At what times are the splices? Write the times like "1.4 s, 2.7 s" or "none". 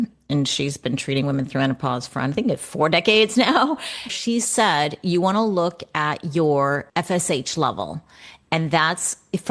4.1 s, 6.9 s